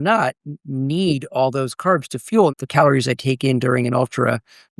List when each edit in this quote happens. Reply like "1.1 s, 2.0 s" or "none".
2.5 s